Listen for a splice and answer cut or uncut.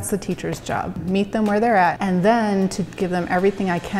cut